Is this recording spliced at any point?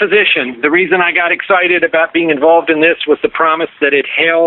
no; 0 cuts

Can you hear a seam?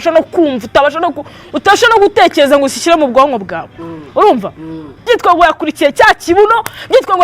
yes; 1 cut; at 4.9 s

